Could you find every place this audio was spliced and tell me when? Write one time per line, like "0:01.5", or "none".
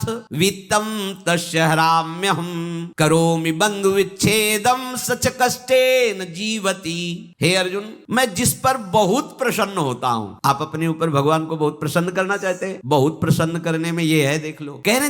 none